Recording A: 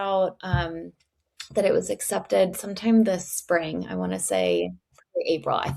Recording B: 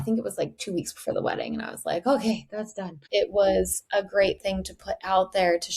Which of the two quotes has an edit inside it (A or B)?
B